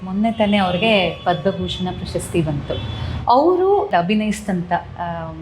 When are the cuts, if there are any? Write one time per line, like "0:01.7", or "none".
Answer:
0:03.9